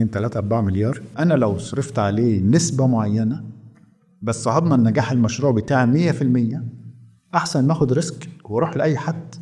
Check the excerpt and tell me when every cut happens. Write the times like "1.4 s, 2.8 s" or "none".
1.1 s